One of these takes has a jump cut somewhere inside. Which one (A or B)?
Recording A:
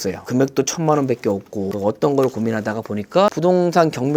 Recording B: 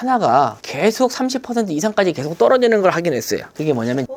A